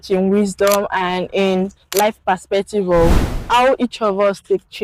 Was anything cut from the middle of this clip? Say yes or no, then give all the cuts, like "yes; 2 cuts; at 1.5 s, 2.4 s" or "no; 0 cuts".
yes; 1 cut; at 3.3 s